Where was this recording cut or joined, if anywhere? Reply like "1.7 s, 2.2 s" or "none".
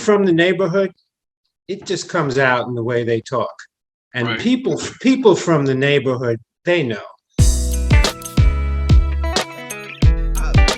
7.2 s